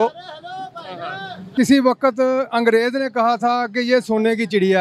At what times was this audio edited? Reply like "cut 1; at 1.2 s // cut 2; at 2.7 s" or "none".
cut 1; at 1.4 s